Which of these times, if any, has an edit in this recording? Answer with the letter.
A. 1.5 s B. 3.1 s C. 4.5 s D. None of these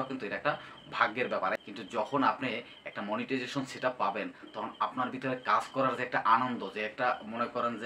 A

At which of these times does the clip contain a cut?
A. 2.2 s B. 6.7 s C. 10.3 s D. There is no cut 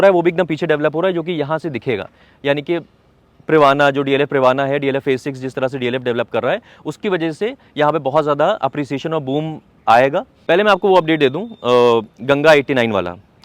C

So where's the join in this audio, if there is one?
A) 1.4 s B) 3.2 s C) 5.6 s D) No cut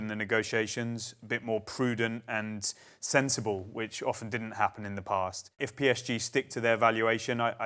C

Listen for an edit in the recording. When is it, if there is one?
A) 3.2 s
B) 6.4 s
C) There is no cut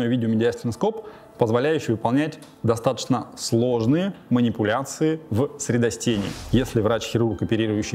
B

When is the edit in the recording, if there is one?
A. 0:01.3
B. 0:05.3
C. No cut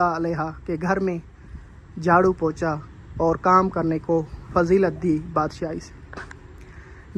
C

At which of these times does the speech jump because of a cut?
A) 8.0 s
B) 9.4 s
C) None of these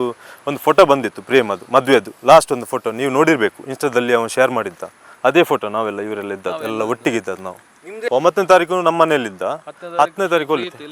A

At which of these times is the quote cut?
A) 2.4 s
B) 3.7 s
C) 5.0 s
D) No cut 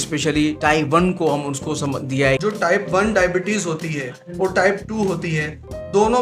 A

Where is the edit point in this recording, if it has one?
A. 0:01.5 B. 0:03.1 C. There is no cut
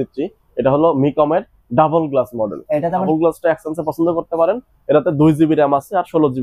B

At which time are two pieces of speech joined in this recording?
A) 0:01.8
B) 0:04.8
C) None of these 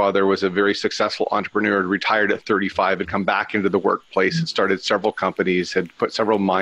C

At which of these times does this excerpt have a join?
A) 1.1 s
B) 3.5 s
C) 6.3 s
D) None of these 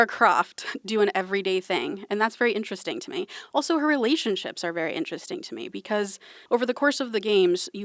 C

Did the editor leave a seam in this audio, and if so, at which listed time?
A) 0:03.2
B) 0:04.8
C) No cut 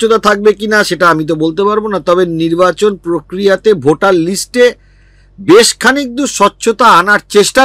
C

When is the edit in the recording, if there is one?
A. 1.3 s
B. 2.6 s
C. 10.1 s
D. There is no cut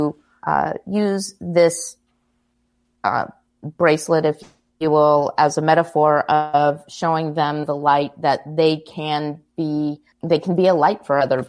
C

